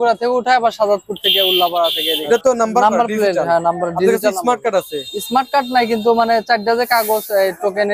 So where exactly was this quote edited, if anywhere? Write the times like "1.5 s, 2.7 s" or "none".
2.2 s